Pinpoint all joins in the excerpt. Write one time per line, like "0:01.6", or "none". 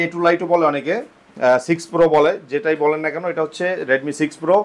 none